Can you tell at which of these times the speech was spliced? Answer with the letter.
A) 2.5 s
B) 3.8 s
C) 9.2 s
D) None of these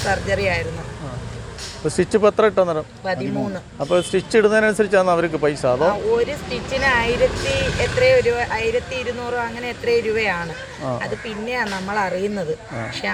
D